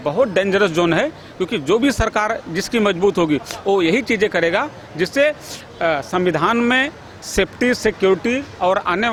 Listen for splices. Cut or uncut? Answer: uncut